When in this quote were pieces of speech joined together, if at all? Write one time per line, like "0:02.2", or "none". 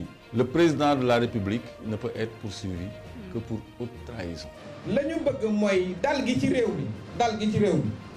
0:04.7